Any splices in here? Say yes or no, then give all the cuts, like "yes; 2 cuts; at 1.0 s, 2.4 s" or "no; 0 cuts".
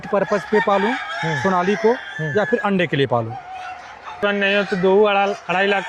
yes; 1 cut; at 4.2 s